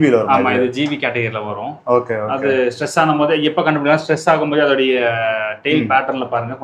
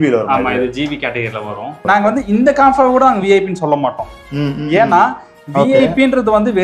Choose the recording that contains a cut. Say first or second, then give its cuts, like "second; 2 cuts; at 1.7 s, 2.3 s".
second; 1 cut; at 1.8 s